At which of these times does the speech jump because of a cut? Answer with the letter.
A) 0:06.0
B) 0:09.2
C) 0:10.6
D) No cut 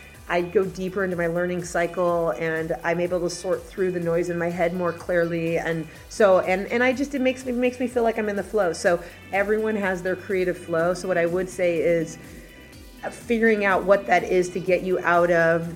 B